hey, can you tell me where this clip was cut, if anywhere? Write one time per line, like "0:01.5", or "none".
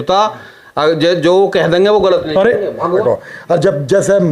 0:03.0